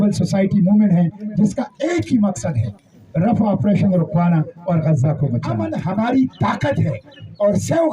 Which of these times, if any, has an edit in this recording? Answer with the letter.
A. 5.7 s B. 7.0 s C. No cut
A